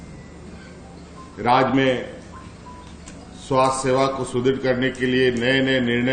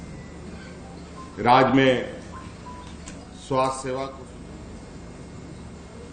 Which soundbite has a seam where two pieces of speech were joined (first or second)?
second